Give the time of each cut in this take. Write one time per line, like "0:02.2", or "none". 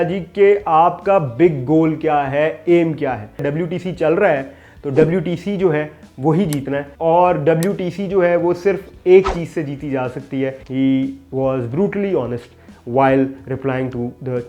0:03.4
0:06.9
0:10.6